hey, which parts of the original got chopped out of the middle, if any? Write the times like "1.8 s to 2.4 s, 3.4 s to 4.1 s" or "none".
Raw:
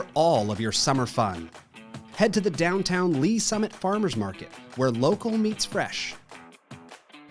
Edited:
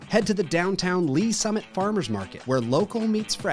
4.4 s to 4.6 s

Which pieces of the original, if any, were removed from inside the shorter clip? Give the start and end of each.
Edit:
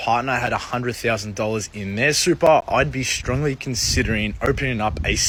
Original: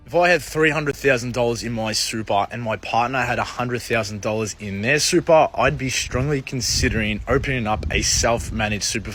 none

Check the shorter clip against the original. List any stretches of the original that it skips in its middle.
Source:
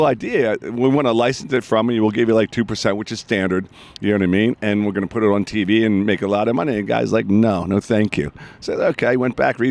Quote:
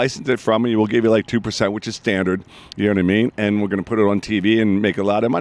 none

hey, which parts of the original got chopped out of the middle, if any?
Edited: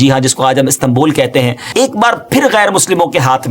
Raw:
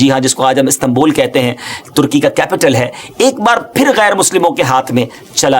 1.6 s to 3.0 s

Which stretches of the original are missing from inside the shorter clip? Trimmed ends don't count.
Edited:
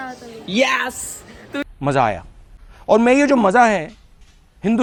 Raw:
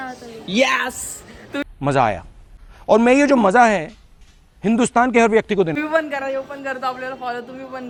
none

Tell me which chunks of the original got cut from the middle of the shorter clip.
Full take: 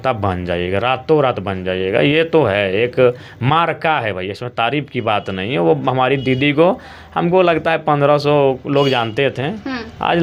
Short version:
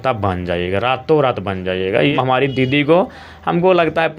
2.1 s to 5.8 s

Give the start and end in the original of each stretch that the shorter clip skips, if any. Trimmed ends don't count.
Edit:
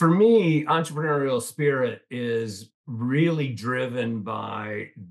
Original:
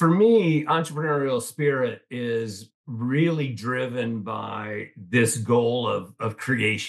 none

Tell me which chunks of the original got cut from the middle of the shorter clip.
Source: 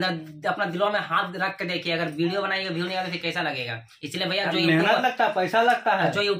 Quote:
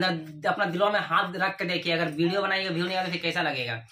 none

